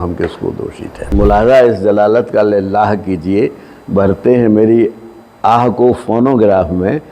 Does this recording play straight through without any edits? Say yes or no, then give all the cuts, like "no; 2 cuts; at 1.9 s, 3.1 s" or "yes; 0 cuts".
no; 1 cut; at 1.1 s